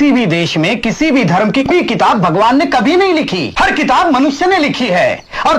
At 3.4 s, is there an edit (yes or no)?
yes